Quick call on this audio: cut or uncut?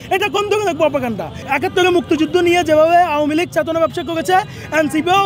cut